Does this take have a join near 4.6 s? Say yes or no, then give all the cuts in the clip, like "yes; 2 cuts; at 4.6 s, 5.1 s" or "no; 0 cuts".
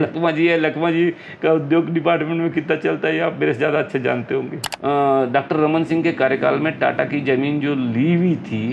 yes; 1 cut; at 4.6 s